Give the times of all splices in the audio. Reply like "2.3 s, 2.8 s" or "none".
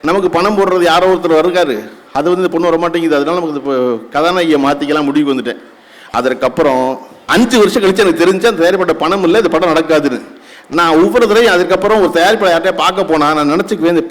7.1 s